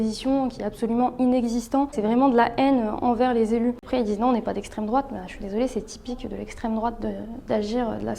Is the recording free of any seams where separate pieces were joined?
no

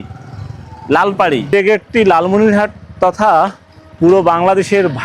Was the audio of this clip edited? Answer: yes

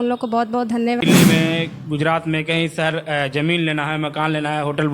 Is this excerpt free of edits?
no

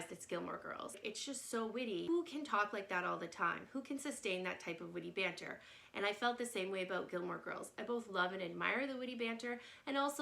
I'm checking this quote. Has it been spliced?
yes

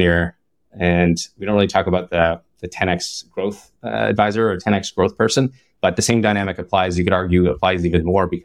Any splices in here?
no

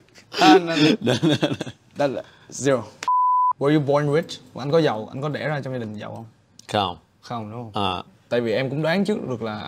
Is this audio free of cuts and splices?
no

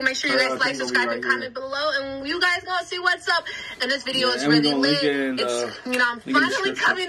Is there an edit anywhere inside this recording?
yes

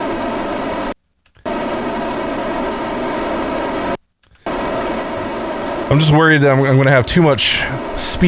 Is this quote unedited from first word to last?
yes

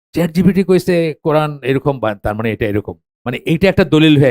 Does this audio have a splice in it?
yes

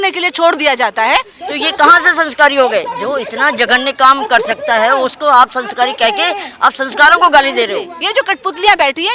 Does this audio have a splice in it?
yes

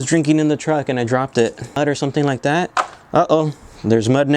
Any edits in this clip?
yes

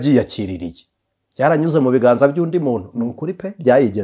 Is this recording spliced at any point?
no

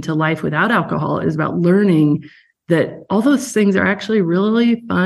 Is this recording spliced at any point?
no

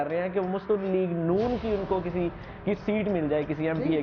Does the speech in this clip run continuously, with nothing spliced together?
yes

